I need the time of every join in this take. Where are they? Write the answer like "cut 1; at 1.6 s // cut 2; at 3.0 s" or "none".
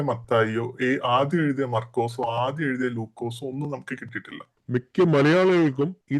cut 1; at 4.5 s

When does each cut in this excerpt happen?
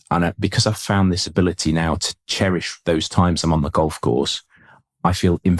cut 1; at 2.1 s

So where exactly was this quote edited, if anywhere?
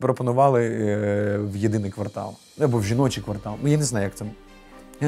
none

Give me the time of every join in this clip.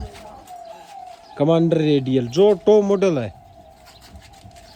none

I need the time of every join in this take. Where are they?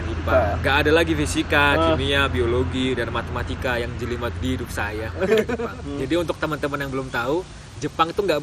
cut 1; at 5.6 s

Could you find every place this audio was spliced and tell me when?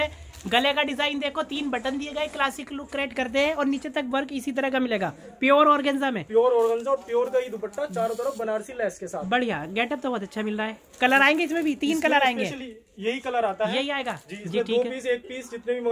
none

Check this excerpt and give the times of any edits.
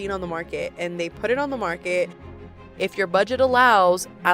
cut 1; at 2.5 s

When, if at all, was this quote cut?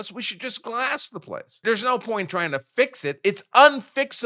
cut 1; at 1.6 s

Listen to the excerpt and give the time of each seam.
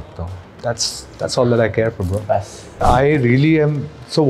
cut 1; at 2.8 s

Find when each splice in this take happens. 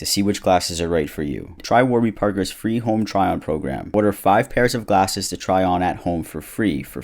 cut 1; at 1.6 s

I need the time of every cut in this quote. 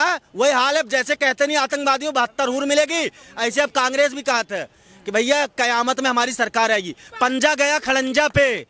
cut 1; at 7.0 s

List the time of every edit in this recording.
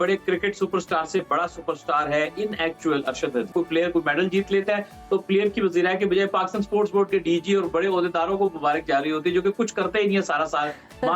cut 1; at 3.5 s

